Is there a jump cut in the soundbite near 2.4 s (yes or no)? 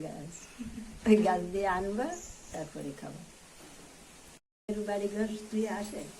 no